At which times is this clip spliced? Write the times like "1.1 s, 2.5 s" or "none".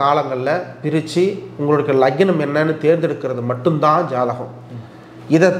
none